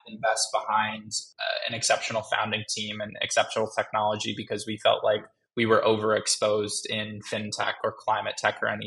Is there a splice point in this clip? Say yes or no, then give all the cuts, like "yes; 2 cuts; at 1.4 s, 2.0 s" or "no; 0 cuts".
no; 0 cuts